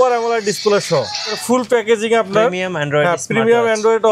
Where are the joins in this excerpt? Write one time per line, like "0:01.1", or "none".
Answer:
0:01.4